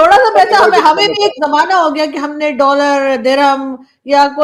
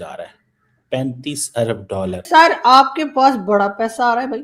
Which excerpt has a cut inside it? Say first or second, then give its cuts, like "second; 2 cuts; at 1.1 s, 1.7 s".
second; 1 cut; at 2.2 s